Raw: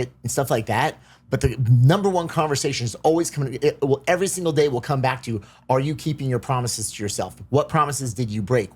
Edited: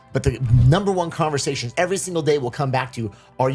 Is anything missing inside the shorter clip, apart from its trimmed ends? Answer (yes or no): yes